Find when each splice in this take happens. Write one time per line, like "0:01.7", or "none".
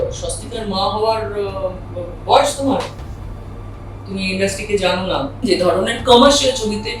0:05.4